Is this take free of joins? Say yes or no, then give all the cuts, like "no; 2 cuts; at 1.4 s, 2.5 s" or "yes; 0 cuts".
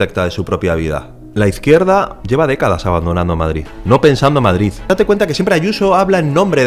no; 4 cuts; at 1.2 s, 2.2 s, 3.7 s, 4.9 s